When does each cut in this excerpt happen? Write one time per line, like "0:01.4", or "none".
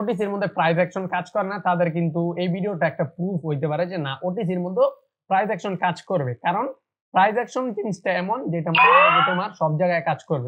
none